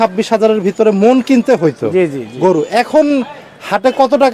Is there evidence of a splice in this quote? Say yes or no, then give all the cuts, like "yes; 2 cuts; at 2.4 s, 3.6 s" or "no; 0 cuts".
no; 0 cuts